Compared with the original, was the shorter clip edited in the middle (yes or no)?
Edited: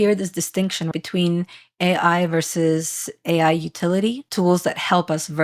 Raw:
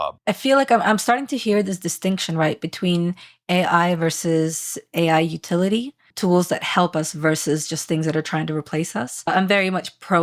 yes